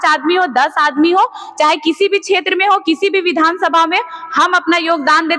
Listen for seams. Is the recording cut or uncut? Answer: uncut